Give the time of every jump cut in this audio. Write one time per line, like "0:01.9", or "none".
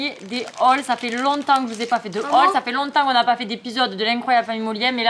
none